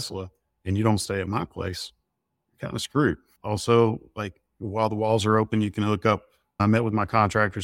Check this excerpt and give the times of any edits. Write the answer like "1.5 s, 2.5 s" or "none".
3.3 s, 6.6 s